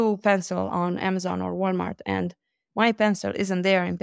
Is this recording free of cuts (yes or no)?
yes